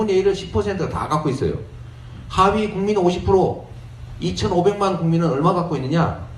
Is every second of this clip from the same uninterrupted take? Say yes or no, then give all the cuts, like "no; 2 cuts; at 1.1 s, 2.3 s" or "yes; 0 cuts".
no; 1 cut; at 5.4 s